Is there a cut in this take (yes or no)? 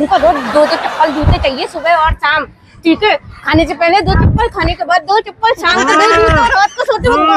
yes